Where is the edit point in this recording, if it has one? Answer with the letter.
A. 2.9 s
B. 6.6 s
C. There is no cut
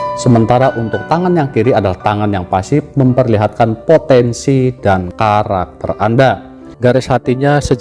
B